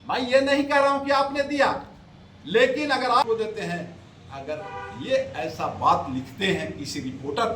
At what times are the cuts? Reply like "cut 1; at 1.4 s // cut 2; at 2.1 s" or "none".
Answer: cut 1; at 3.2 s